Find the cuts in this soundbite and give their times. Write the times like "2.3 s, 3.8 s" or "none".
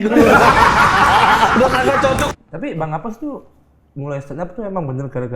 2.2 s